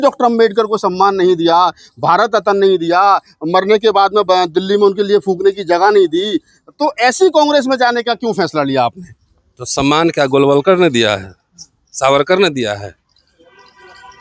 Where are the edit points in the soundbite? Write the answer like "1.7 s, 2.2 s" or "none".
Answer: none